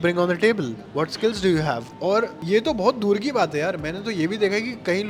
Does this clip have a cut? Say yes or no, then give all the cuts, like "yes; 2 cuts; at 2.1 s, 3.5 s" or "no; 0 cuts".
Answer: no; 0 cuts